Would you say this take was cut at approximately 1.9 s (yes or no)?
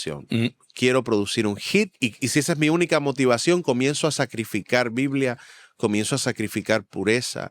yes